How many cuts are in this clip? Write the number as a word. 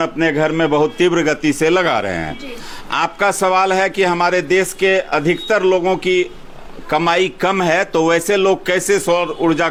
zero